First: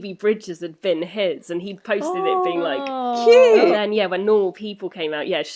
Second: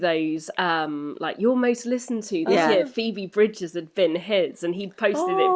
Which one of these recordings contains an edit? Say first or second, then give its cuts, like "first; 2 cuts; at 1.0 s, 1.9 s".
first; 1 cut; at 3.7 s